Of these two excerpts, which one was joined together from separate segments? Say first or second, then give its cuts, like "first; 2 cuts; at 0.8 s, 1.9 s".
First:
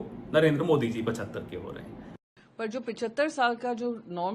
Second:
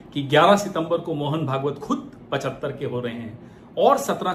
first; 1 cut; at 2.1 s